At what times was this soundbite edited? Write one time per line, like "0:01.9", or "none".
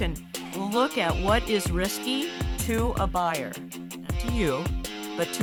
none